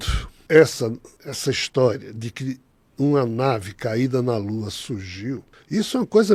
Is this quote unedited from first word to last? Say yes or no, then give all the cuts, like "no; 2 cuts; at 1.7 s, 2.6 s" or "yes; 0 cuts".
yes; 0 cuts